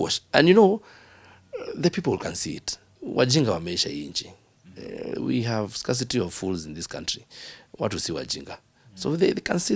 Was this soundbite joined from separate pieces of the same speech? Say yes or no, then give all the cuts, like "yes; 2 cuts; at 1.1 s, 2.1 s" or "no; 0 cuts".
yes; 1 cut; at 3.0 s